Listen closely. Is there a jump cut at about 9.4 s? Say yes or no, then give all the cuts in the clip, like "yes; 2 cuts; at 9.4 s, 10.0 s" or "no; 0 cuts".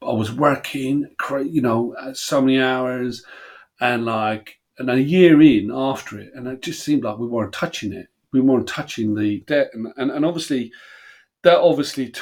yes; 1 cut; at 9.4 s